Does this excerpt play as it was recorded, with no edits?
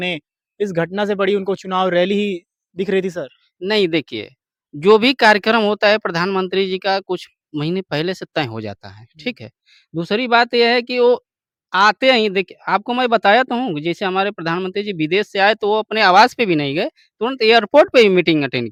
yes; 0 cuts

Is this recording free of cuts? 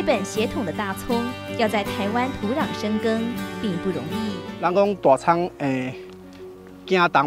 no; 1 cut; at 4.5 s

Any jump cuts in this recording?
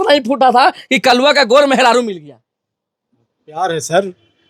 no; 0 cuts

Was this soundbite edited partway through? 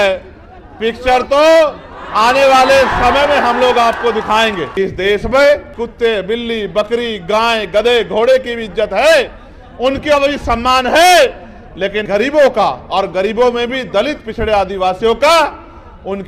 yes; 3 cuts; at 4.7 s, 5.8 s, 12.0 s

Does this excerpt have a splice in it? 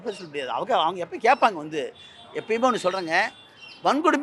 no; 0 cuts

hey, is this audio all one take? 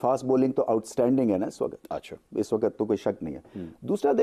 yes; 0 cuts

